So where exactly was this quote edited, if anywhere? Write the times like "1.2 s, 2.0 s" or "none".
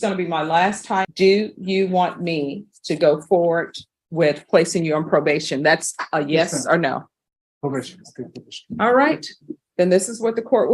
1.1 s